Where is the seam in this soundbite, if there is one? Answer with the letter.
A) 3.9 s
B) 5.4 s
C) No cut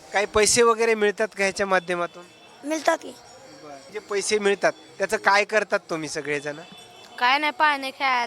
A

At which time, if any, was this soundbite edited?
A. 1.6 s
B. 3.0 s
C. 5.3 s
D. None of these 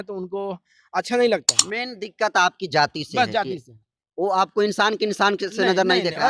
A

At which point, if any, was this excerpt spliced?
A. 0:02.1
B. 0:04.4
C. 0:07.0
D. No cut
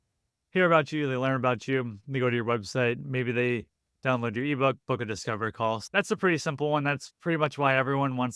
D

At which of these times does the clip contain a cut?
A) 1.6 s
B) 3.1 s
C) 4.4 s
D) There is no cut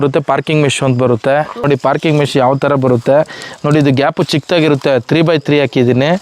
A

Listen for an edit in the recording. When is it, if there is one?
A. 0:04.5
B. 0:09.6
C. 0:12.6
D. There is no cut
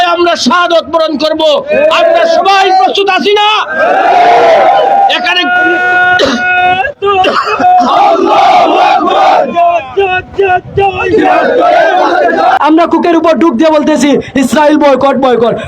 C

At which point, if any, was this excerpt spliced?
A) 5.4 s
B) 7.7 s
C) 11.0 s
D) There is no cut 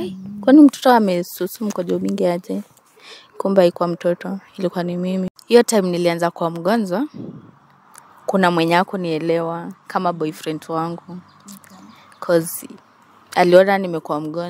A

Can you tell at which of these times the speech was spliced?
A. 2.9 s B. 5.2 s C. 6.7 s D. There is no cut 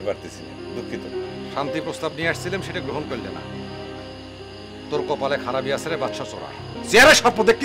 C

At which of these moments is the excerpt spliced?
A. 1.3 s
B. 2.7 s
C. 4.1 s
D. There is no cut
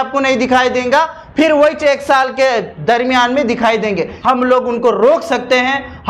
C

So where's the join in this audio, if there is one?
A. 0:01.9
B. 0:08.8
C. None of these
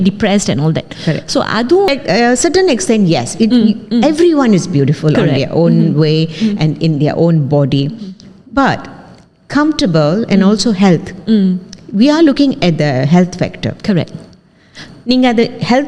A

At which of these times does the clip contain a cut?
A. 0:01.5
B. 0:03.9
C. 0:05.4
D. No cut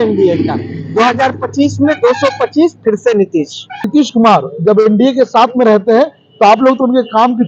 B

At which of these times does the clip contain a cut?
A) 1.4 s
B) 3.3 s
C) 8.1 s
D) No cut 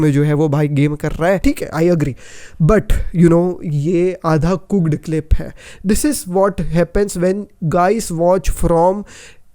A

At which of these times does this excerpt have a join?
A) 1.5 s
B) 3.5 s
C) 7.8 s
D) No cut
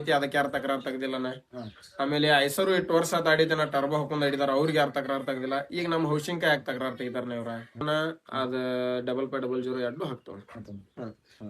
C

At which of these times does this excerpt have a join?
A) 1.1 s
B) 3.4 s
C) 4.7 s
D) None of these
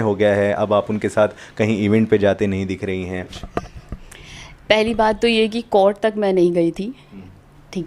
B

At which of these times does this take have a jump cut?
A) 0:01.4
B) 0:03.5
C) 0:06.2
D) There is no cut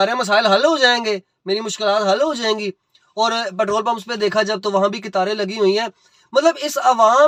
D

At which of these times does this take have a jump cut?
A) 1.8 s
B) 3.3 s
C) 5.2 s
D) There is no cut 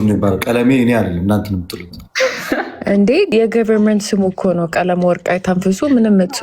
B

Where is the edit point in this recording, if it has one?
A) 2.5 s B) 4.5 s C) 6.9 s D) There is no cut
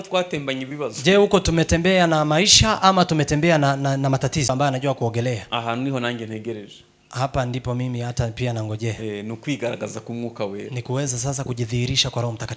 B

